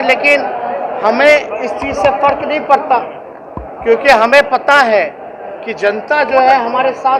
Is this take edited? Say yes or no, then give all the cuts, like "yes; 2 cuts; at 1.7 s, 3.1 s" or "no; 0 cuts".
no; 0 cuts